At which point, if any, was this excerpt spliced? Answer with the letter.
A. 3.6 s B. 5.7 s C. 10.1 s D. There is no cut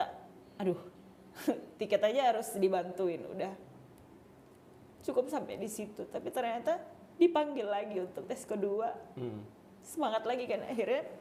D